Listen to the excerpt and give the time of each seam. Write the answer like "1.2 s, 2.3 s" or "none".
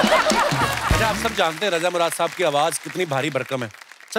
1.0 s